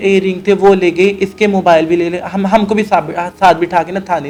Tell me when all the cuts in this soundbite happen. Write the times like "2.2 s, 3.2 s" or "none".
none